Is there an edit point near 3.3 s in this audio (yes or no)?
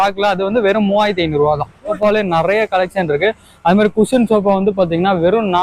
no